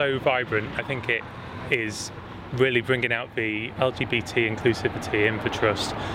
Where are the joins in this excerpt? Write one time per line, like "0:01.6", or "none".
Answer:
0:00.8
0:03.7